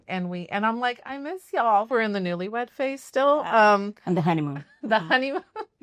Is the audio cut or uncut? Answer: cut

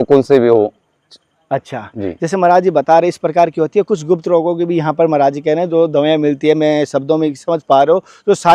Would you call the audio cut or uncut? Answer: uncut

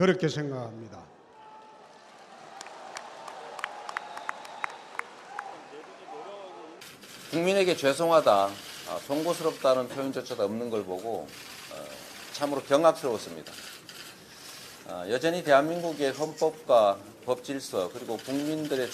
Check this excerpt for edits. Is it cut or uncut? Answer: cut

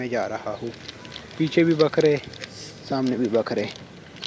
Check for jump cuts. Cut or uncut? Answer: uncut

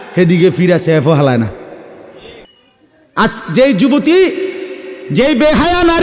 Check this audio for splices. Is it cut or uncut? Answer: cut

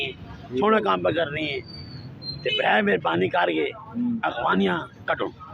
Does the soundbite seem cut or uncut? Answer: uncut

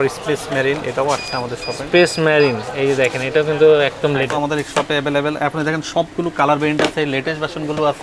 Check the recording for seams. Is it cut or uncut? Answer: cut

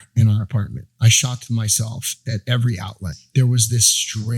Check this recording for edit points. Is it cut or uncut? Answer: cut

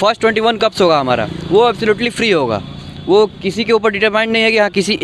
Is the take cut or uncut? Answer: uncut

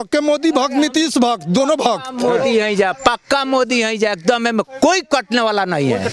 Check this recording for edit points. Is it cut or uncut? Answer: uncut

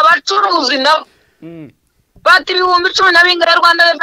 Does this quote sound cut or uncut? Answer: uncut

